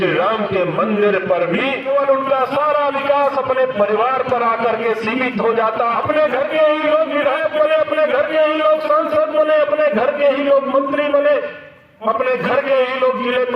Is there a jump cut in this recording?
yes; 2 cuts; at 1.9 s, 6.0 s

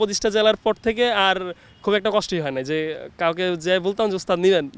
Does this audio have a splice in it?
no; 0 cuts

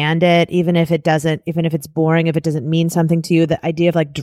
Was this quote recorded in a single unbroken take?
yes; 0 cuts

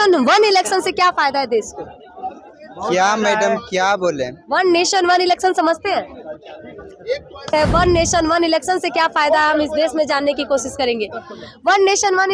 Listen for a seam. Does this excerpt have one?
yes; 1 cut; at 7.5 s

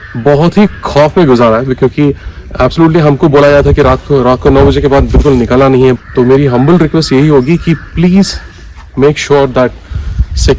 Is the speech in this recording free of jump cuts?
no; 1 cut; at 6.0 s

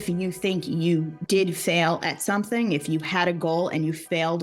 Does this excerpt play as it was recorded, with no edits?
no; 1 cut; at 1.2 s

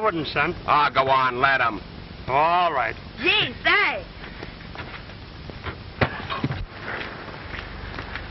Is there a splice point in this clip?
yes; 1 cut; at 1.1 s

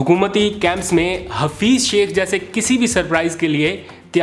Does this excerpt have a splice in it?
no; 0 cuts

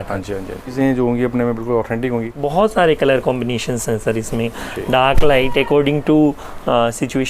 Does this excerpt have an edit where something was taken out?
yes; 2 cuts; at 0.7 s, 2.3 s

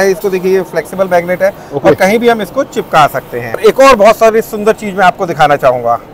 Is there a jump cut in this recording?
yes; 1 cut; at 3.6 s

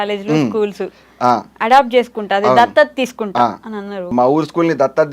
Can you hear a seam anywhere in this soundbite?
yes; 1 cut; at 4.1 s

